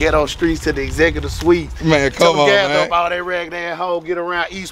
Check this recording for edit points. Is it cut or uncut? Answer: uncut